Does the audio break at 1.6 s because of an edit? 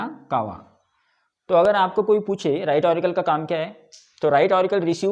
no; 0 cuts

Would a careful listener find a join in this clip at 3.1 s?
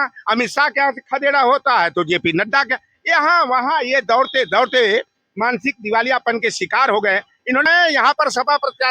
no; 1 cut; at 7.7 s

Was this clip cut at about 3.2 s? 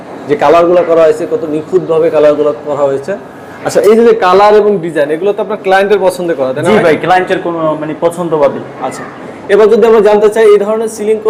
no; 0 cuts

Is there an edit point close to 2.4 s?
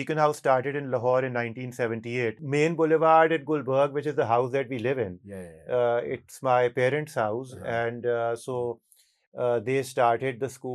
yes; 1 cut; at 2.4 s

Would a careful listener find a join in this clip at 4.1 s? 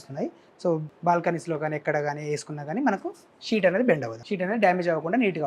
yes; 2 cuts; at 0.9 s, 4.1 s

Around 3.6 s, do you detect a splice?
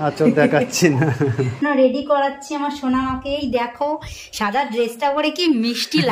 no; 1 cut; at 1.6 s

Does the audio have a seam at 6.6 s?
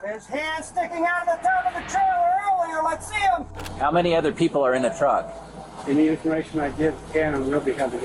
no; 1 cut; at 3.7 s

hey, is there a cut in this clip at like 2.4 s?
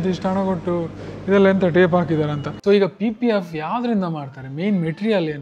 yes; 1 cut; at 2.4 s

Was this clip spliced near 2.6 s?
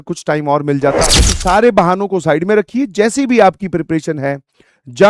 no; 1 cut; at 1.0 s

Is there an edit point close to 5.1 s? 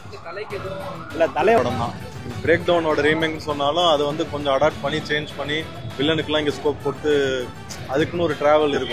no; 1 cut; at 1.6 s

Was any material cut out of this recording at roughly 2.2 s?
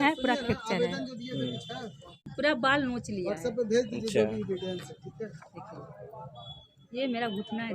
yes; 1 cut; at 2.2 s

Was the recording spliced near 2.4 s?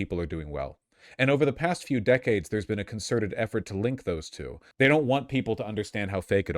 no; 1 cut; at 4.6 s

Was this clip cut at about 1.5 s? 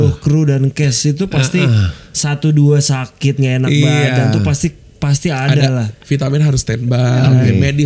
no; 1 cut; at 5.9 s

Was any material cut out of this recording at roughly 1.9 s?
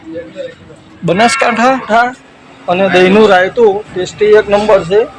yes; 1 cut; at 1.9 s

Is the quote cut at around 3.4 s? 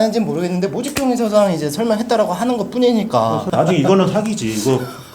yes; 1 cut; at 3.4 s

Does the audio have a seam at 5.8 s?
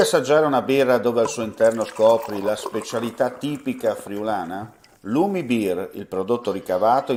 no; 0 cuts

